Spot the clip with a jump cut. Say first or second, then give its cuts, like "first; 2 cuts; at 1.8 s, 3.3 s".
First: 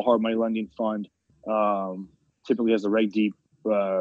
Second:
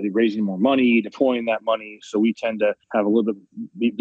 second; 1 cut; at 2.8 s